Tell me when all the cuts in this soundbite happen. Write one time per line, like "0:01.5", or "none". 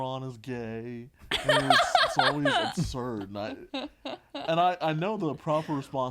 none